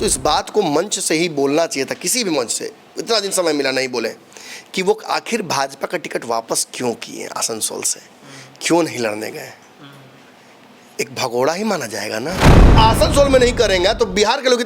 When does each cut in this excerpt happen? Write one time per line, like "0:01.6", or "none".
0:12.7

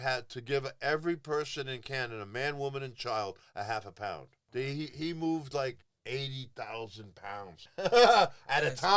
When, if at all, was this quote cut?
0:04.3
0:05.9
0:07.6

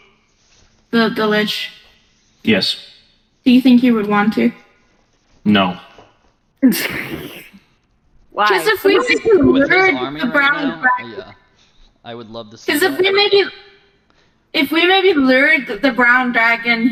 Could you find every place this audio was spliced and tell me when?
none

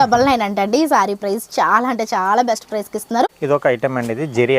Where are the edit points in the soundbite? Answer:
0:03.3

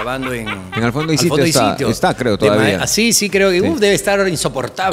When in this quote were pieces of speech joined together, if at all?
none

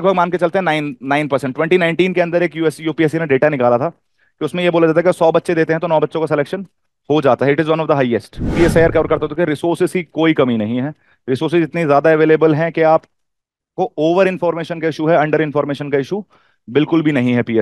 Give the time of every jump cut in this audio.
0:08.5

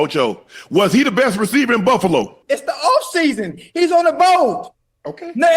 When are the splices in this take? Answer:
0:02.4

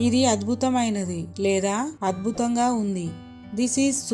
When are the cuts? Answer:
0:03.0

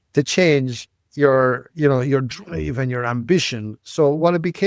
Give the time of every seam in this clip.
none

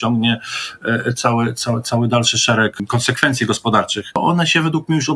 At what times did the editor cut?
0:02.8
0:04.2

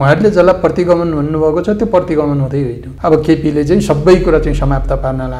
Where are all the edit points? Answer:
0:02.9

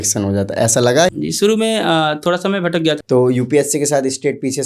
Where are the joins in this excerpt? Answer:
0:01.1
0:03.0

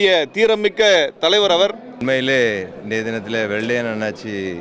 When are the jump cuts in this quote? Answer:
0:01.9

